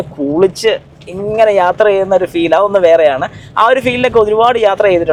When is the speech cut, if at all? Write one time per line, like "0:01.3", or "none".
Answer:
none